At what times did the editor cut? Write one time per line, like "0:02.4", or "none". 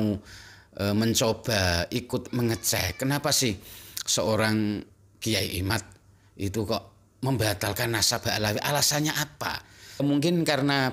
0:10.0